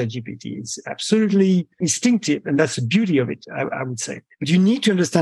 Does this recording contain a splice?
yes; 1 cut; at 1.9 s

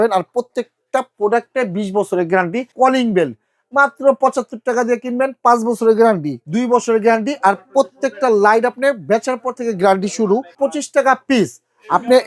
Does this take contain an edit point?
yes; 3 cuts; at 2.7 s, 6.4 s, 10.5 s

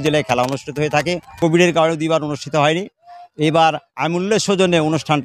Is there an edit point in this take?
no; 0 cuts

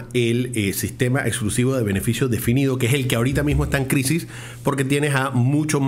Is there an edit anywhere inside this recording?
no; 0 cuts

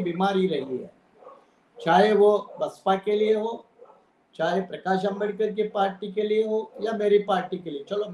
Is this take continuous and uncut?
yes; 0 cuts

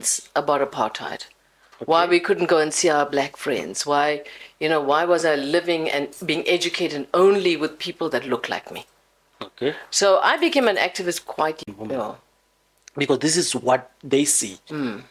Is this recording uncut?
no; 1 cut; at 11.6 s

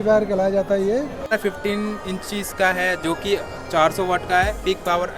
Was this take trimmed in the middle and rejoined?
yes; 1 cut; at 1.4 s

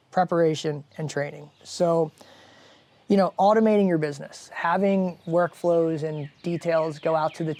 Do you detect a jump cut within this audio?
no; 0 cuts

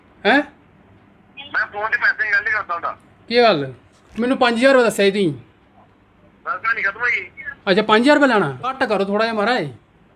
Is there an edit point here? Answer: no; 0 cuts

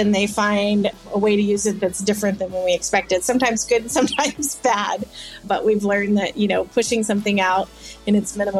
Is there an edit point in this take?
yes; 2 cuts; at 0.9 s, 5.5 s

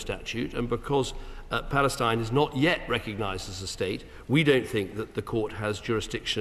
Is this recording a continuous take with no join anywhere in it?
yes; 0 cuts

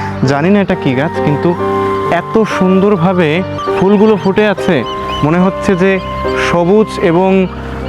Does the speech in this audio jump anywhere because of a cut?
no; 0 cuts

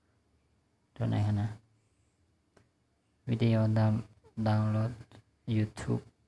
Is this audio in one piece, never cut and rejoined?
no; 1 cut; at 1.9 s

